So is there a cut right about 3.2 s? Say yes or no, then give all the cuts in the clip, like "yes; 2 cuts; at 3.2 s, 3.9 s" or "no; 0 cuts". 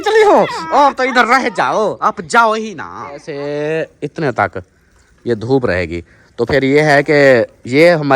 yes; 1 cut; at 3.2 s